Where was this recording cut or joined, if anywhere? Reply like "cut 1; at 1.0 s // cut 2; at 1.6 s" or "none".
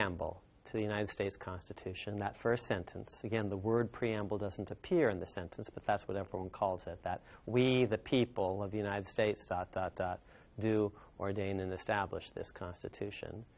none